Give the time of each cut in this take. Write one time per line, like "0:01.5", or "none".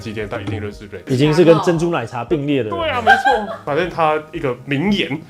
0:01.0